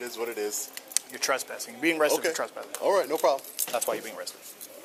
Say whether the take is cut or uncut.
uncut